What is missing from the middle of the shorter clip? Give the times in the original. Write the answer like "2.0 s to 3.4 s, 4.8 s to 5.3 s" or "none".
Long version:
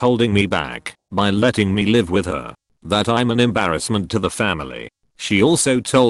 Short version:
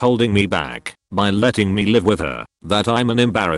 2.0 s to 2.2 s